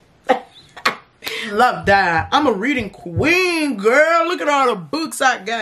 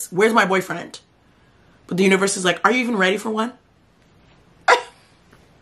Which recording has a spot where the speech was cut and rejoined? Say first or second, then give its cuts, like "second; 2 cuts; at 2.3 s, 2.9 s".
first; 1 cut; at 1.5 s